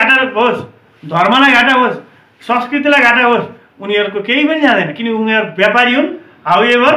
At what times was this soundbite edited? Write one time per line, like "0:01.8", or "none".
none